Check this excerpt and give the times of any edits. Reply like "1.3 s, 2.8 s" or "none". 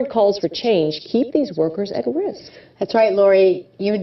1.7 s